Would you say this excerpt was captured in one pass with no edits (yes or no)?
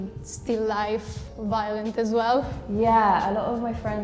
no